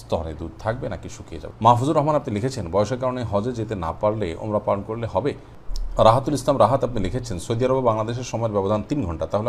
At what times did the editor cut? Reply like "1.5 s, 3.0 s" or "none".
1.4 s, 5.5 s